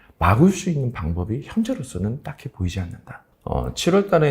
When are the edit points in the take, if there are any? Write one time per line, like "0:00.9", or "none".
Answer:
0:03.2